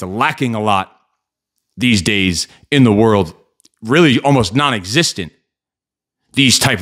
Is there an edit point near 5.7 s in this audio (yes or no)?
no